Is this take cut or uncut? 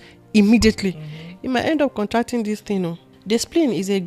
cut